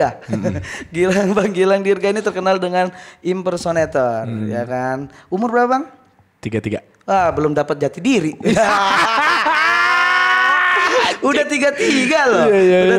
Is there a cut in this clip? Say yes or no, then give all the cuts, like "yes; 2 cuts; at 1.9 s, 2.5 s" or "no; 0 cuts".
no; 0 cuts